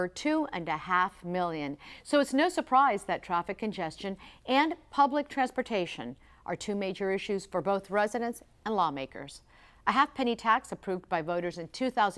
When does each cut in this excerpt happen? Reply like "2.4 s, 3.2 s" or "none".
none